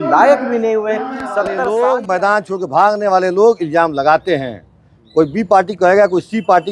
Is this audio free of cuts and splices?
no; 1 cut; at 1.6 s

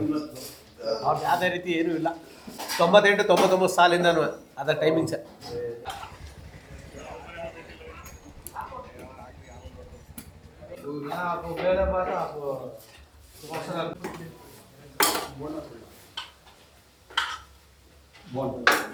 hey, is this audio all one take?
yes; 0 cuts

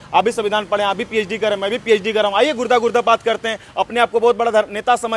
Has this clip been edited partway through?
no; 0 cuts

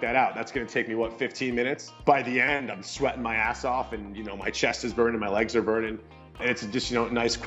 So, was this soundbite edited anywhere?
yes; 2 cuts; at 2.0 s, 6.4 s

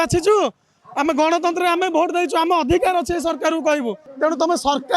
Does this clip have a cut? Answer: yes; 1 cut; at 4.0 s

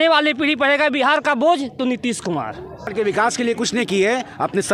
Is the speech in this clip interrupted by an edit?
no; 0 cuts

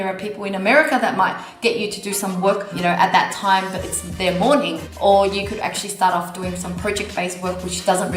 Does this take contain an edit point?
yes; 2 cuts; at 2.7 s, 4.8 s

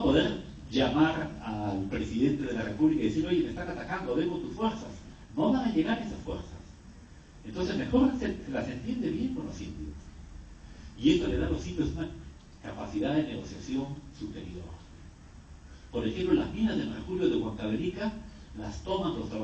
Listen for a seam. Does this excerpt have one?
yes; 1 cut; at 5.5 s

